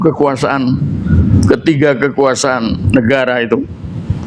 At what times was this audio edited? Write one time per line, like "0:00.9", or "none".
none